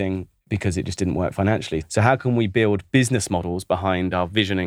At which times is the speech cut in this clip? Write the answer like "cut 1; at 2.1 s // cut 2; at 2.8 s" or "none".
none